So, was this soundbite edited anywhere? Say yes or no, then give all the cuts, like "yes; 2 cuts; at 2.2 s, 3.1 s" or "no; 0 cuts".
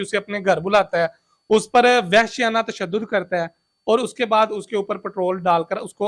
no; 0 cuts